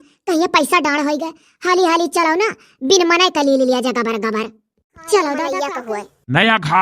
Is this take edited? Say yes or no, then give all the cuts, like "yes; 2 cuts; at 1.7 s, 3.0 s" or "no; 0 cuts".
yes; 1 cut; at 5.8 s